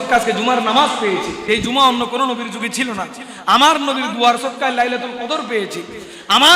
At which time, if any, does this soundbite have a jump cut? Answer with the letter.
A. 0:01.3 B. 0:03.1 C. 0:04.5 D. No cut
A